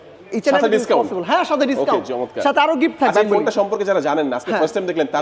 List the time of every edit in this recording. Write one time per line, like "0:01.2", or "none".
none